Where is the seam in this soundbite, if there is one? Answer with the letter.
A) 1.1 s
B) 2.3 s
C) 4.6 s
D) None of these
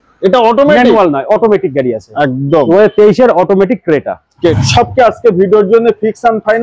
C